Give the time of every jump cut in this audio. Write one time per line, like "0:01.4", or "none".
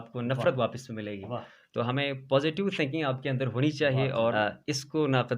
0:04.3